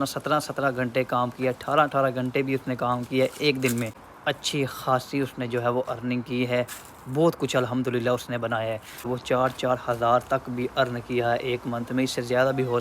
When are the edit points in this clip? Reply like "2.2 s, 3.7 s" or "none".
4.1 s, 9.1 s